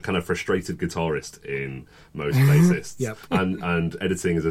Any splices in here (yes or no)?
no